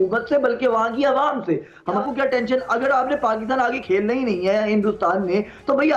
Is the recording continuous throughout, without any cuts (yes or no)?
no